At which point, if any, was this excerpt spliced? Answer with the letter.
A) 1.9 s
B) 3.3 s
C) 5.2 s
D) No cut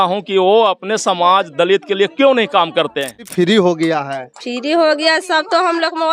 B